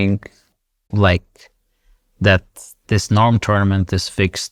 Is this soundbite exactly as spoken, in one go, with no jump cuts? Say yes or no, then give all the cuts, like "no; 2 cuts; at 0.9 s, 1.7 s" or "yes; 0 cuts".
yes; 0 cuts